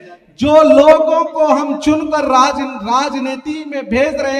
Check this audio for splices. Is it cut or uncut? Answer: uncut